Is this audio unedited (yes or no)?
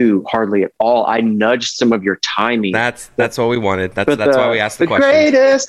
yes